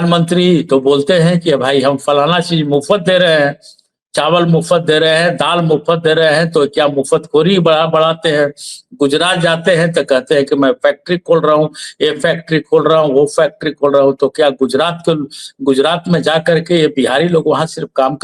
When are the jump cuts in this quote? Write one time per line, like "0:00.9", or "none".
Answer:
none